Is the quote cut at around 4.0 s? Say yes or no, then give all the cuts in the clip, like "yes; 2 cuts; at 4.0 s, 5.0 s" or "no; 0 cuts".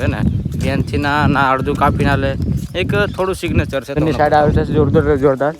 yes; 1 cut; at 4.0 s